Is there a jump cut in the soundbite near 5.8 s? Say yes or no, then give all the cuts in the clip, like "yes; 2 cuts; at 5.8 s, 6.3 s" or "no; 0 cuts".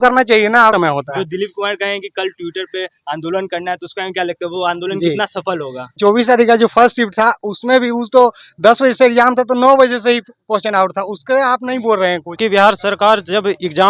yes; 3 cuts; at 0.7 s, 5.8 s, 12.3 s